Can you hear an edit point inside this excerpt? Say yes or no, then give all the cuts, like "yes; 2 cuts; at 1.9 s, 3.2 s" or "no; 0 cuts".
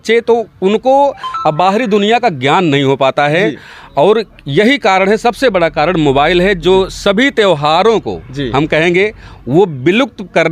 no; 0 cuts